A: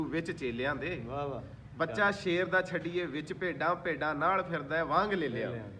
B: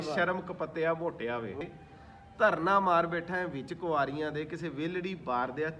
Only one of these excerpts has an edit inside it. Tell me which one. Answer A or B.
B